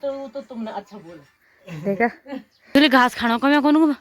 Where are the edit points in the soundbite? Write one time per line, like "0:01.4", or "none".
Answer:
0:02.8